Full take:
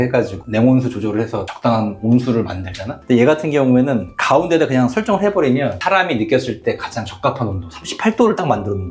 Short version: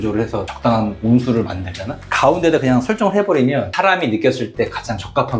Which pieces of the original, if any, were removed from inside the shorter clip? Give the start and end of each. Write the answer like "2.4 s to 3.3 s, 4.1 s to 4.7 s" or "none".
3.0 s to 4.1 s